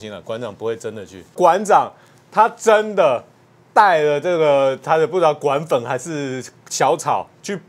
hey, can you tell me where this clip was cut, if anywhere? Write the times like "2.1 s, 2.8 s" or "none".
1.4 s